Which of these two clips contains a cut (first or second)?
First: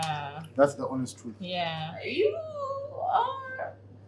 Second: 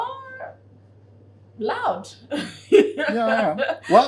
first